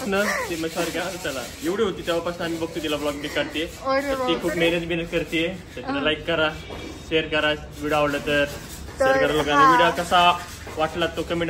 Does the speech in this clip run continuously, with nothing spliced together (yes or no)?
yes